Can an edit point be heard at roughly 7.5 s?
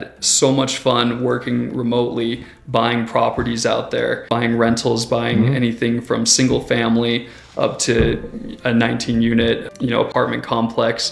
no; 2 cuts; at 4.3 s, 9.7 s

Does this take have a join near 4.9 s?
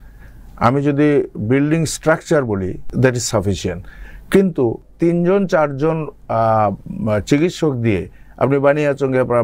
yes; 2 cuts; at 2.8 s, 4.9 s

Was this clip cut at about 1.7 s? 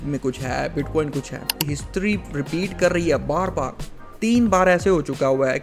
yes; 1 cut; at 1.7 s

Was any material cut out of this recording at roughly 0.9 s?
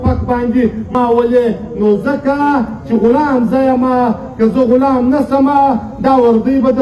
yes; 1 cut; at 0.9 s

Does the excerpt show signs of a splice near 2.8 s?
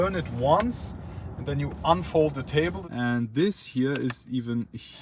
yes; 1 cut; at 2.8 s

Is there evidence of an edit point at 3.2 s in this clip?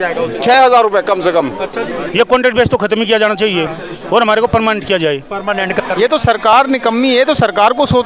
no; 2 cuts; at 2.0 s, 5.8 s

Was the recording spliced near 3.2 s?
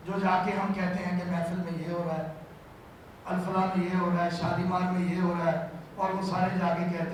no; 0 cuts

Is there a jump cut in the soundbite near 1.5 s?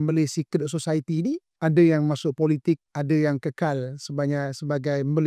yes; 2 cuts; at 1.5 s, 2.9 s

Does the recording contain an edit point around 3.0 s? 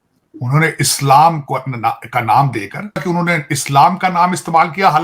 yes; 1 cut; at 3.0 s

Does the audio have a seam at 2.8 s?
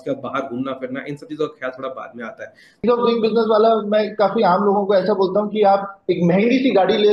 yes; 1 cut; at 2.8 s

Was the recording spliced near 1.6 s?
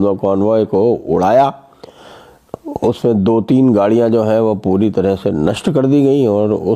no; 0 cuts

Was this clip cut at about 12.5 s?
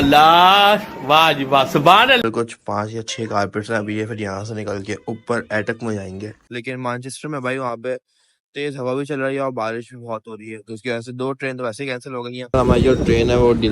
yes; 3 cuts; at 2.3 s, 6.3 s, 12.5 s

